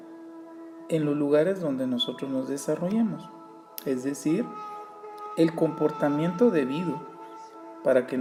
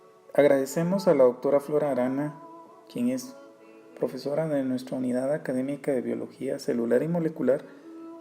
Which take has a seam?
second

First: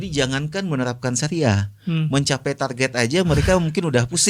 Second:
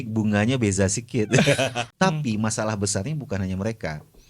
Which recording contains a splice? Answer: second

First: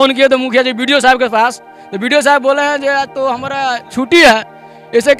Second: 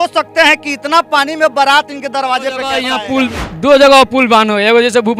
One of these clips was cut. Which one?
second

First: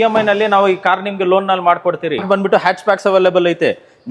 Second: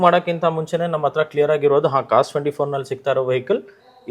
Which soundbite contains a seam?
first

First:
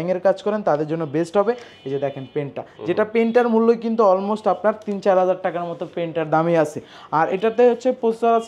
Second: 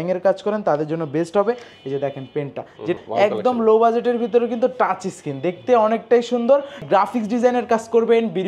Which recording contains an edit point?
second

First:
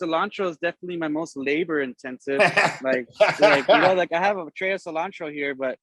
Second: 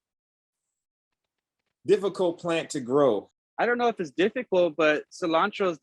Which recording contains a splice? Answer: second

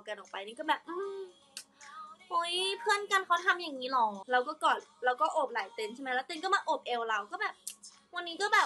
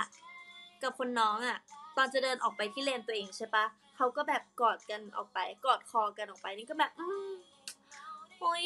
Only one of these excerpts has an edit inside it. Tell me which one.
first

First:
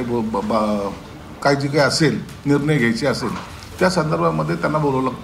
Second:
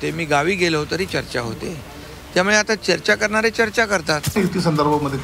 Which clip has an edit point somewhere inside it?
second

